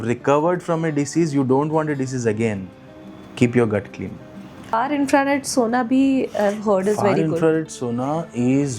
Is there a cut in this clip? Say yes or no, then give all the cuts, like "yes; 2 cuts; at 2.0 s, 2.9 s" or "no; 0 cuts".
yes; 1 cut; at 4.7 s